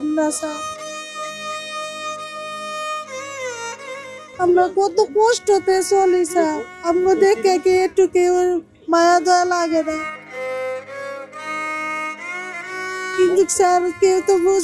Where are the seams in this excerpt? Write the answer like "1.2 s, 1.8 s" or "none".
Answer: none